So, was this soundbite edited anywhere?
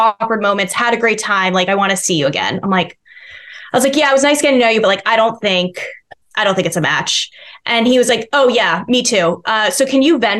no; 0 cuts

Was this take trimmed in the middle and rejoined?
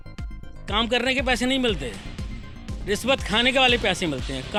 no; 0 cuts

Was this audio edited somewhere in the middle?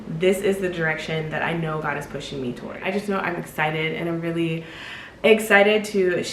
yes; 1 cut; at 2.8 s

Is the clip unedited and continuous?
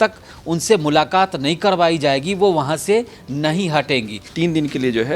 no; 1 cut; at 4.2 s

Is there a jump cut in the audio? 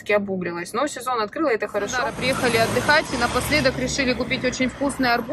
yes; 1 cut; at 2.1 s

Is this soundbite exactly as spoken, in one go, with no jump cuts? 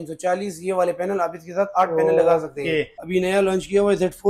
no; 1 cut; at 3.0 s

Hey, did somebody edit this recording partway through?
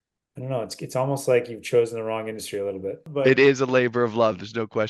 yes; 1 cut; at 3.1 s

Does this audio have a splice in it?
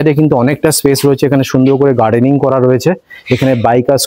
no; 0 cuts

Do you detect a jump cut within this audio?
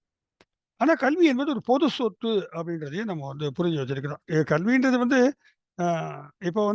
no; 0 cuts

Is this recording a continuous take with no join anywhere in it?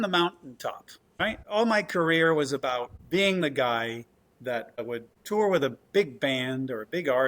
no; 3 cuts; at 1.0 s, 3.0 s, 4.8 s

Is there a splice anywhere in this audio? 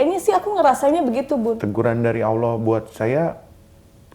yes; 1 cut; at 1.6 s

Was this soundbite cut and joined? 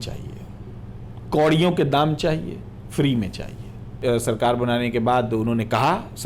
yes; 1 cut; at 4.0 s

